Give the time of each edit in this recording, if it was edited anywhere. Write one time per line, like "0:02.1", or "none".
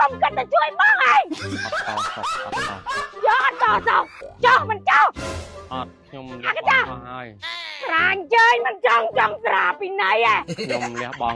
0:04.2